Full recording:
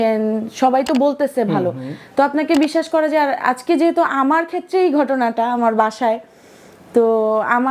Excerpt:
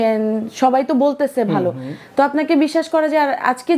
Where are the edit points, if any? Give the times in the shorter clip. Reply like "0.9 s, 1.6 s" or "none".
none